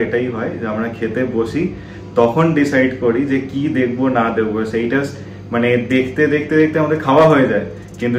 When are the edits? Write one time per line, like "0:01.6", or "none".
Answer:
none